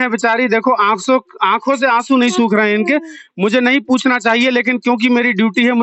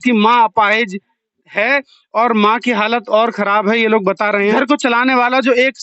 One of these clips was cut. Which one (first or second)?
second